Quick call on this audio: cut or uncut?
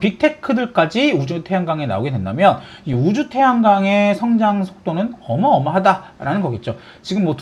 uncut